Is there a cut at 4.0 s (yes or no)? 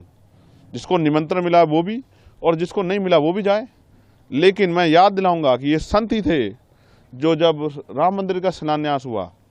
no